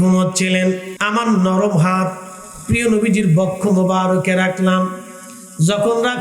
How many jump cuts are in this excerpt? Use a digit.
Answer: 1